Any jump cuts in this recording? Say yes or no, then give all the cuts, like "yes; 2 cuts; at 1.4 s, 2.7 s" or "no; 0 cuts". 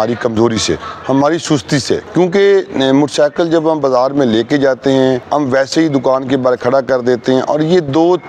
yes; 2 cuts; at 2.1 s, 5.2 s